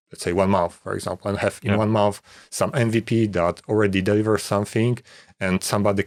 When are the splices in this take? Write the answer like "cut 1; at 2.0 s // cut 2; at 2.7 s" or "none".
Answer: none